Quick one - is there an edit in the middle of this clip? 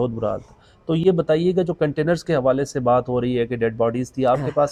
no; 0 cuts

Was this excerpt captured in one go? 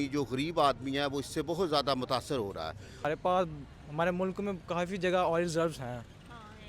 no; 1 cut; at 3.0 s

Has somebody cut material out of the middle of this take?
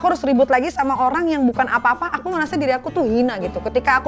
no; 0 cuts

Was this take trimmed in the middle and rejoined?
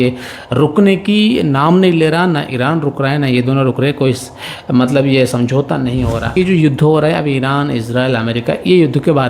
yes; 1 cut; at 6.3 s

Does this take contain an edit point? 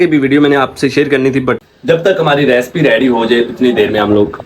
yes; 1 cut; at 1.6 s

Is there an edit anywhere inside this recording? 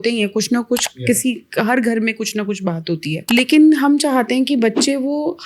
yes; 1 cut; at 3.1 s

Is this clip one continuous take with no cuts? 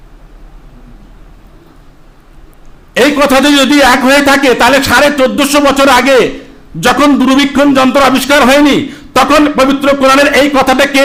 yes; 0 cuts

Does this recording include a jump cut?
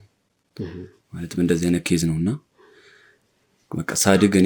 no; 0 cuts

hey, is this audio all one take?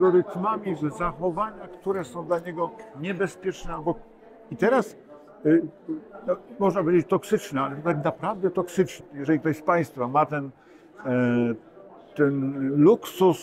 no; 1 cut; at 9.1 s

